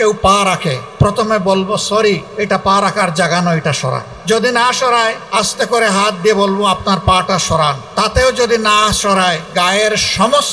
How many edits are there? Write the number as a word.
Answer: six